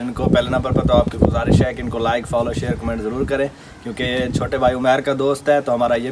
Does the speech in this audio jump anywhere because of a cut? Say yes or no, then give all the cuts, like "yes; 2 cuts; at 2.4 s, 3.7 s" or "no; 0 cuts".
no; 0 cuts